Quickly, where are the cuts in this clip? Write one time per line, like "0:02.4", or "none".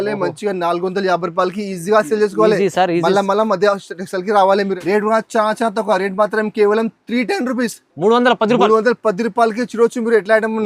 0:04.8

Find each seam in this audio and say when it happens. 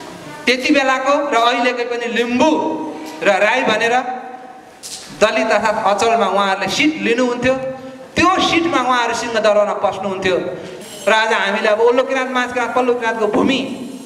0:10.7

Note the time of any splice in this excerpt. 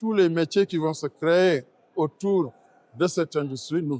none

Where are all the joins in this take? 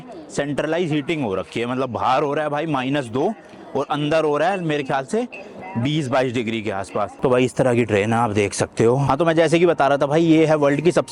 0:07.2
0:09.0

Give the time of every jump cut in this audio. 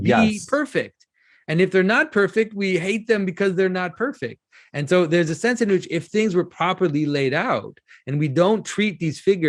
none

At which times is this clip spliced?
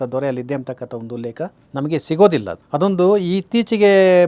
0:02.6

